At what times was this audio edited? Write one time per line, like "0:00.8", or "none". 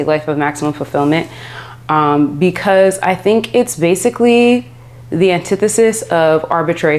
none